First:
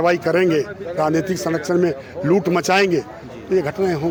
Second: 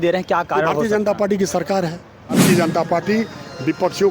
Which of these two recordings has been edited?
second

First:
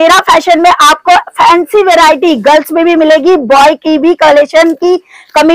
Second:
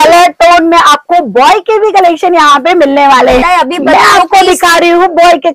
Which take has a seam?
second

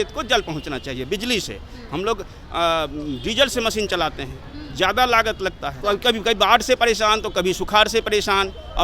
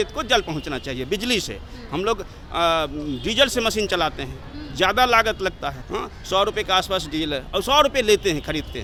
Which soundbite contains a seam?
first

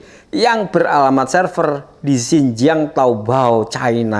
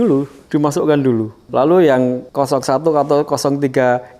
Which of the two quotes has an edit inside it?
second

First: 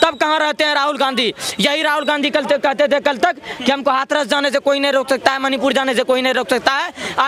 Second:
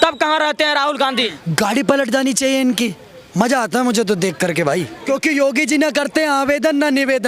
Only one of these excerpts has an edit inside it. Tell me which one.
second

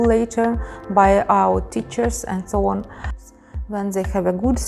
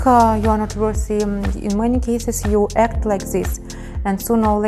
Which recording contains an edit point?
first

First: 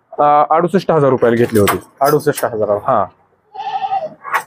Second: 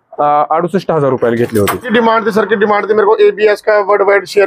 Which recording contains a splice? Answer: second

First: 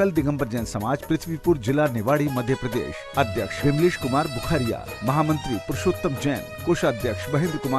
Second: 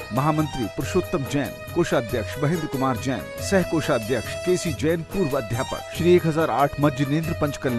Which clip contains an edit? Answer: second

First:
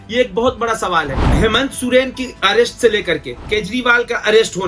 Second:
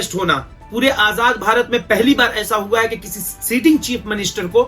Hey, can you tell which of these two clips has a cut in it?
first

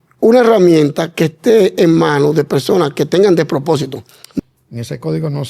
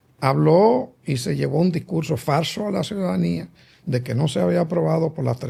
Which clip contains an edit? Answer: first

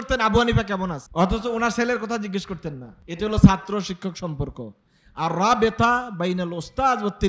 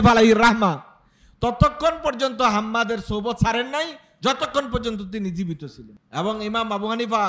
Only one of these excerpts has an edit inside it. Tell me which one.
second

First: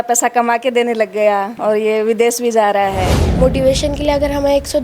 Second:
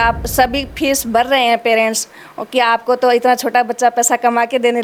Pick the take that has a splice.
first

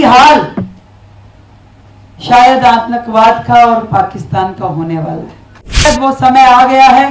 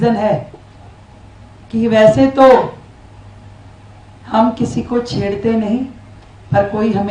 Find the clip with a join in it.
first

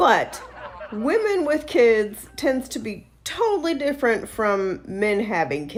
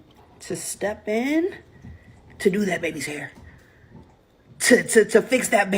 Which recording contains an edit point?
second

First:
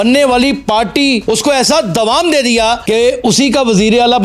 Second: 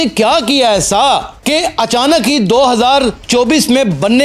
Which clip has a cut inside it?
first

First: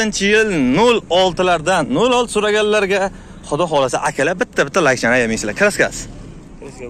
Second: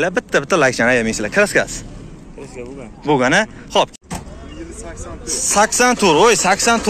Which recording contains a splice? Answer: second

